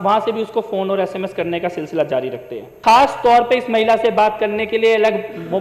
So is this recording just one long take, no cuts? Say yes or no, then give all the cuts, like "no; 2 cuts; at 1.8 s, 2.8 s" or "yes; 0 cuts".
no; 1 cut; at 2.7 s